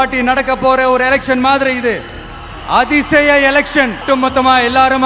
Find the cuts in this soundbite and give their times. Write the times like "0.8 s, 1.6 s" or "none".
4.0 s